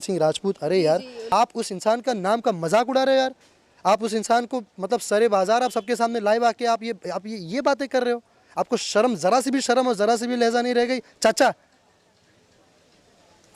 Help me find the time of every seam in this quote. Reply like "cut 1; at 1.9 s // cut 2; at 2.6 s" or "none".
cut 1; at 1.3 s